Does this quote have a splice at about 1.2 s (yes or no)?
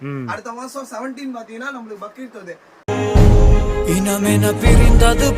no